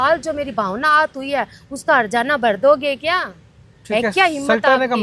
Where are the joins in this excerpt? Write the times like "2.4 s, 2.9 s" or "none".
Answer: none